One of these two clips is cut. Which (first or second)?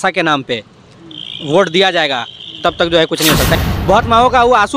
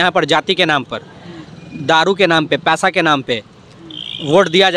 first